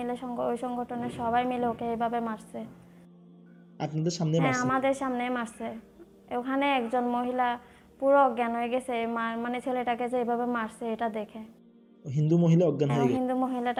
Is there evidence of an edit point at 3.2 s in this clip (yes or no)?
no